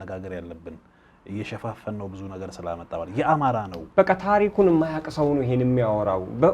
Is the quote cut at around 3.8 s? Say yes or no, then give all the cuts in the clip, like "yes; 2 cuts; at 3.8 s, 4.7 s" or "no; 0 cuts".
yes; 1 cut; at 3.8 s